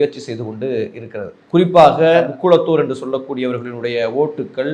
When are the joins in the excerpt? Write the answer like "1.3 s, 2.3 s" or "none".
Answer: 2.2 s